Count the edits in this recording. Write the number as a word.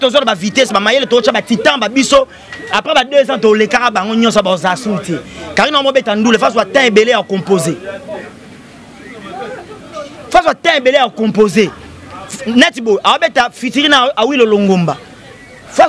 zero